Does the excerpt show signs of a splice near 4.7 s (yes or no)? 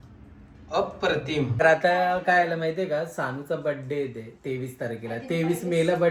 no